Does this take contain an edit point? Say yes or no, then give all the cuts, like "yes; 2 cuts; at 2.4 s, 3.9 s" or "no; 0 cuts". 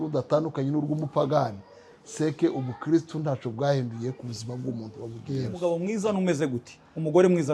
yes; 1 cut; at 5.6 s